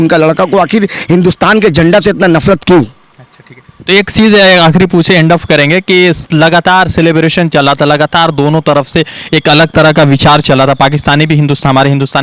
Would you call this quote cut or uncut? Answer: uncut